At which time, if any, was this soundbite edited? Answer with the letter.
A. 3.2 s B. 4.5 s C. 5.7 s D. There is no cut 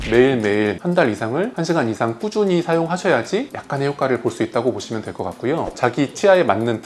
C